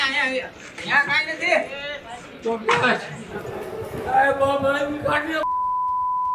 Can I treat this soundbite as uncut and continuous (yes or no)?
no